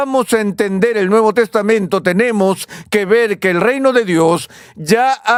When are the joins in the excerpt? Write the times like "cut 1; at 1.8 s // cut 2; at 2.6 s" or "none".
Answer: none